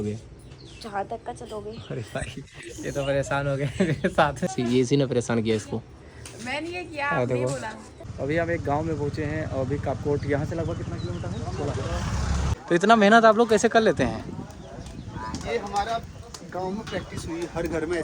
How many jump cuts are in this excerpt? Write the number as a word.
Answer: three